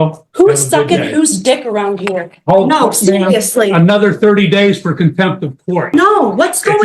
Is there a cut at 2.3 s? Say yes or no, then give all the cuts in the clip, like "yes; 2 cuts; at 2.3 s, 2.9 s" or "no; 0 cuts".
no; 1 cut; at 5.9 s